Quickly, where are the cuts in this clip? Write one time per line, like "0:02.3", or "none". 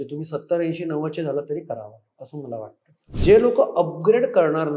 0:03.1